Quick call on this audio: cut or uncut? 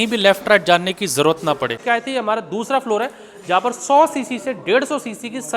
cut